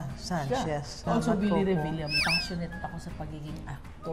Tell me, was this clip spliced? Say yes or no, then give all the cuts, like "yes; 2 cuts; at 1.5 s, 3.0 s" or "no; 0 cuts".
yes; 2 cuts; at 1.1 s, 2.2 s